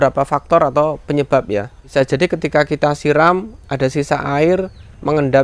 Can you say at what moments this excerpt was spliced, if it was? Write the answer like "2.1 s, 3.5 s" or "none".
1.8 s